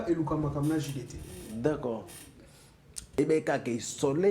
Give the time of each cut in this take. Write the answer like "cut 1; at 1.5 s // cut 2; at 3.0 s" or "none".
cut 1; at 3.2 s